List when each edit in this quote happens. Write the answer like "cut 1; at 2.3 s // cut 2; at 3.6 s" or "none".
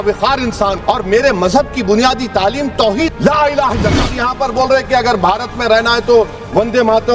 cut 1; at 4.1 s